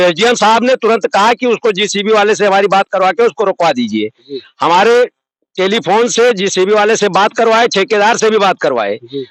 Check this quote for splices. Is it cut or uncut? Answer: uncut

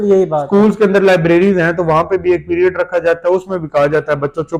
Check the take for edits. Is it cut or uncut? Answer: uncut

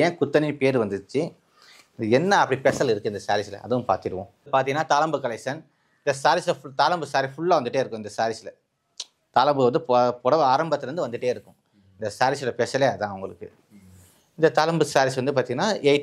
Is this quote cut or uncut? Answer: cut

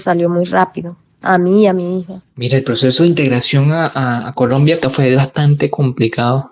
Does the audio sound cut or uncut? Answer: cut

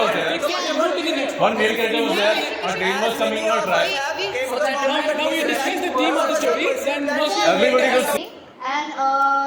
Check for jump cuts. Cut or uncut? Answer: cut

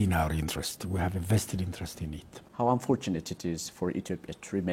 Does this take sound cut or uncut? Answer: cut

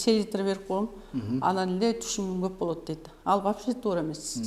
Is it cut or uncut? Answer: uncut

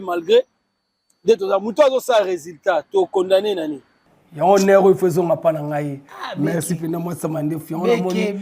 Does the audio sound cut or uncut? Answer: uncut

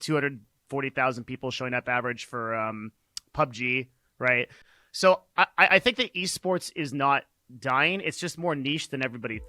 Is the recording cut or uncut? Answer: cut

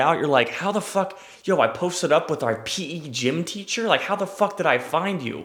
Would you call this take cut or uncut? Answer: uncut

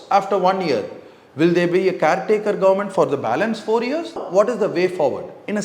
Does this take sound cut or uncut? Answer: cut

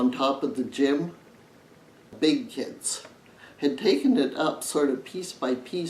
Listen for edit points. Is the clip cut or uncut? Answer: cut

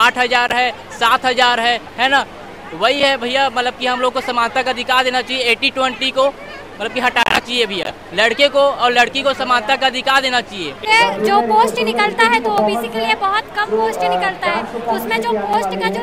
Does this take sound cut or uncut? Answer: cut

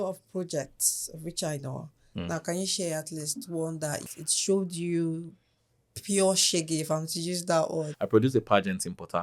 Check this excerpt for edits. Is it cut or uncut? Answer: cut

